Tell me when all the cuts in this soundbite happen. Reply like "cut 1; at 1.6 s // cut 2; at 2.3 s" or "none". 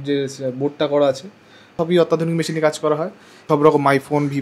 cut 1; at 1.7 s // cut 2; at 3.4 s